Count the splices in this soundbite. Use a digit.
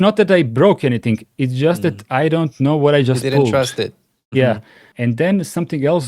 1